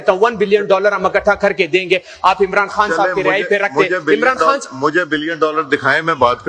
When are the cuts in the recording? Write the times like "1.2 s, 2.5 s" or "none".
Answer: none

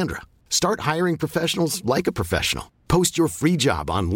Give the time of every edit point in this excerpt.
none

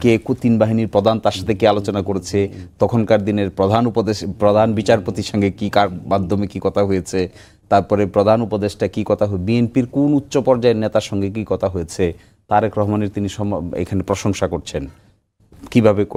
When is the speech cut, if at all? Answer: none

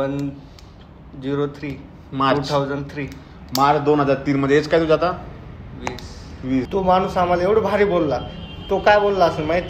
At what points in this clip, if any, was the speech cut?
6.7 s

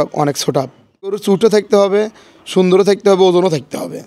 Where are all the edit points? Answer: 1.2 s

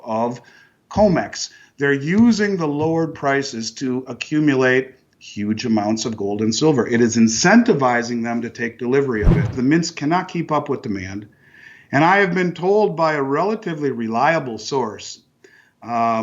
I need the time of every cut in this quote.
9.5 s

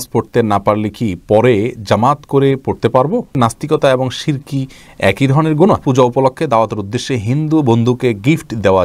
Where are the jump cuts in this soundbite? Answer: 3.4 s, 5.8 s

